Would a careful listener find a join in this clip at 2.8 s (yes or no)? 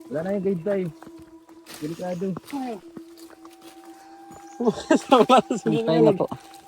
yes